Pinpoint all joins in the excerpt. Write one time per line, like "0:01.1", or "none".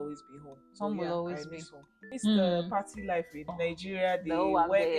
0:02.1
0:03.5

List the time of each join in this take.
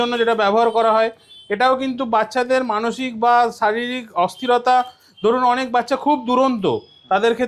none

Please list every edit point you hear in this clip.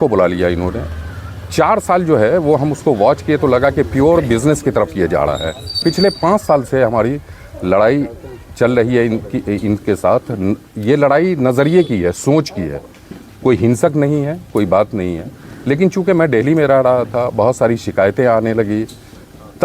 0:05.8

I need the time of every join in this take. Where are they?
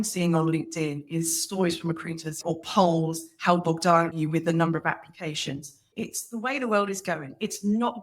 0:02.4
0:04.2
0:05.9

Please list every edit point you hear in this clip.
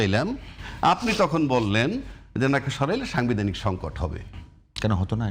none

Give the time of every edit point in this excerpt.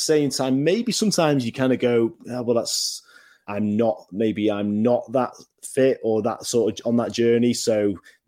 0:03.3

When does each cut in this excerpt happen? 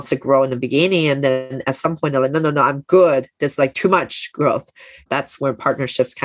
0:05.1

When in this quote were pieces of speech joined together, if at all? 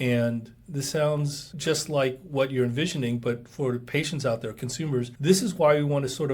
0:01.4
0:05.1

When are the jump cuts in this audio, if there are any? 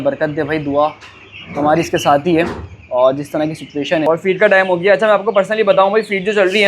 0:04.0

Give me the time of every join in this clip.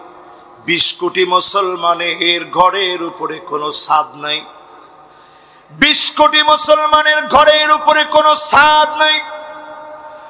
none

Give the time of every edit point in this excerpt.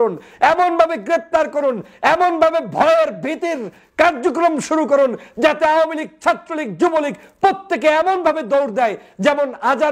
none

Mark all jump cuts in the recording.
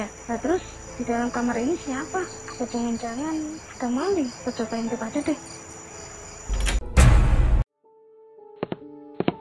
0:06.8
0:08.3

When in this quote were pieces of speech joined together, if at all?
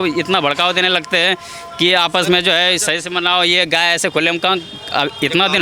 none

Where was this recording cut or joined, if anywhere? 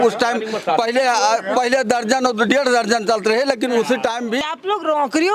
0:04.4

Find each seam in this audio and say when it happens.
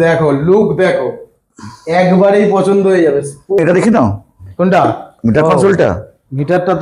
0:03.6

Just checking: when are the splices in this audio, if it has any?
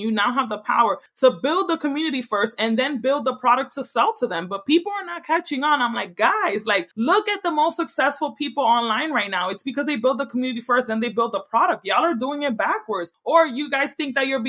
0:01.1
0:06.9
0:13.1

